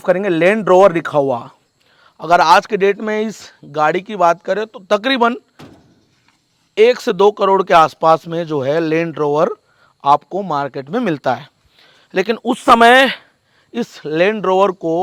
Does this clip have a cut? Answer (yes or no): no